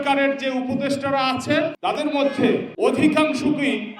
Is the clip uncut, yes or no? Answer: no